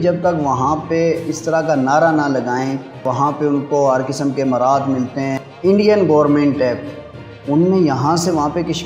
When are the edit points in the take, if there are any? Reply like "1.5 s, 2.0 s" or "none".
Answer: 3.0 s, 5.4 s

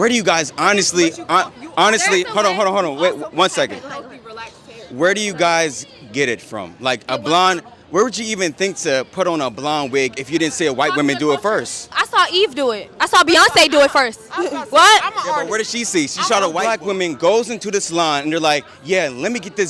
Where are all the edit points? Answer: 16.6 s

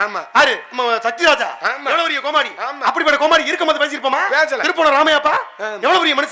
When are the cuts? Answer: 4.7 s

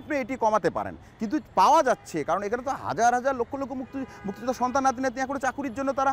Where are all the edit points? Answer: none

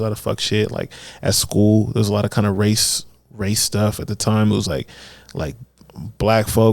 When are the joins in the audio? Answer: none

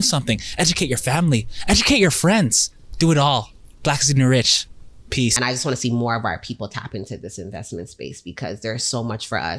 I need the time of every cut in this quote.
5.3 s

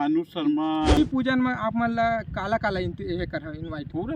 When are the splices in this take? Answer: 0.9 s

